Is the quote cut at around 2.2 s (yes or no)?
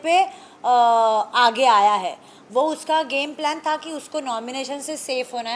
no